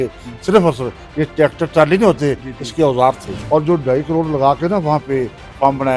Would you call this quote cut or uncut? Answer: cut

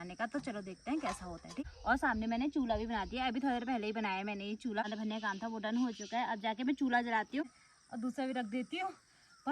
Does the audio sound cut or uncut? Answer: cut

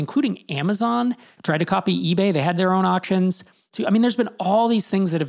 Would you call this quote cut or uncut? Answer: cut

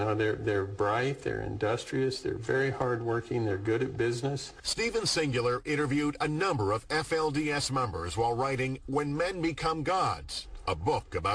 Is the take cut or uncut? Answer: uncut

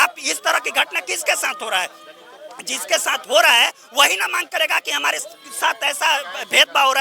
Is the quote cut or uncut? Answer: uncut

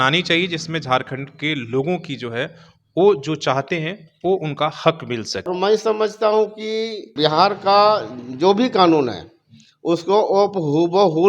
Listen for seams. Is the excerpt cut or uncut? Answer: cut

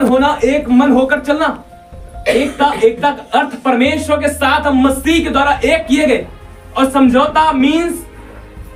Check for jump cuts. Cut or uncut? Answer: uncut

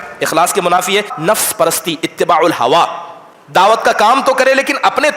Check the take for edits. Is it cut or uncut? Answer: cut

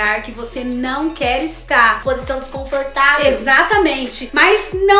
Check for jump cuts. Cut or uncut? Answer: uncut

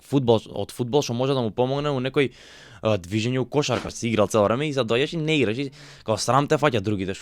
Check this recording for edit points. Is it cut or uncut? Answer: cut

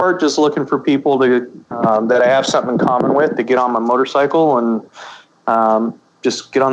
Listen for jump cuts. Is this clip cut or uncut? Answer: uncut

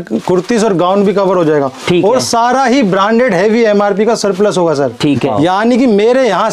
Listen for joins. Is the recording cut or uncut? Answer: cut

